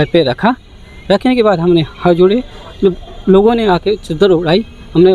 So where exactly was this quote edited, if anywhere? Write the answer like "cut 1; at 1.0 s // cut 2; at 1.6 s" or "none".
none